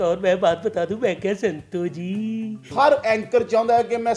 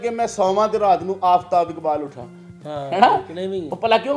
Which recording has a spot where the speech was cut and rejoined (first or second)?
first